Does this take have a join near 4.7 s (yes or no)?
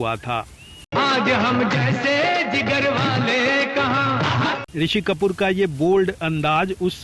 no